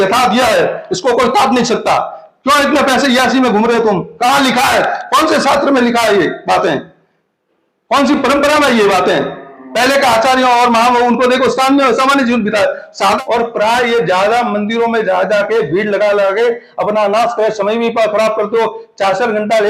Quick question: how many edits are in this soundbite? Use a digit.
1